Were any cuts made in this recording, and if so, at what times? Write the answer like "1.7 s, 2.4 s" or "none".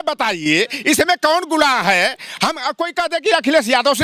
none